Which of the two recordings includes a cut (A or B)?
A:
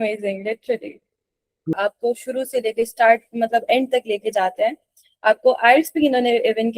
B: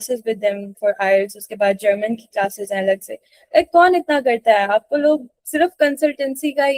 A